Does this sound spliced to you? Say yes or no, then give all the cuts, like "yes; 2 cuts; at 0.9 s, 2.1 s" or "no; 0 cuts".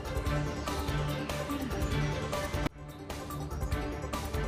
no; 0 cuts